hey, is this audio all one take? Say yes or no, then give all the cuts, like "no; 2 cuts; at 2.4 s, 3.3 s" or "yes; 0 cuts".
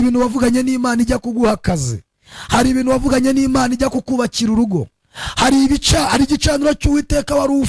yes; 0 cuts